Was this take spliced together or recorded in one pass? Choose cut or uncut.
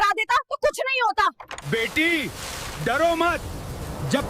cut